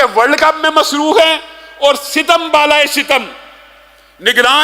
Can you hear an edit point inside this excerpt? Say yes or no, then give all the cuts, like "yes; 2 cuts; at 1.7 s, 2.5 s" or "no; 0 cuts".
no; 0 cuts